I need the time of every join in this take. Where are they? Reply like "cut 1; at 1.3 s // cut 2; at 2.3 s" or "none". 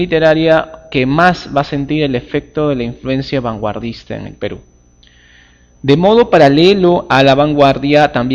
none